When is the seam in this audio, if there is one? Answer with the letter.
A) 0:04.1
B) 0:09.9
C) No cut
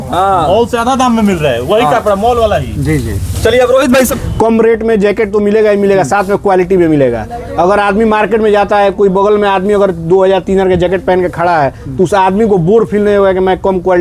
A